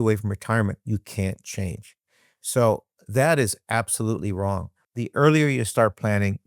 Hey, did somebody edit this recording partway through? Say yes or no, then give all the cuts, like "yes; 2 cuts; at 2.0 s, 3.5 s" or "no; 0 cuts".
yes; 1 cut; at 4.8 s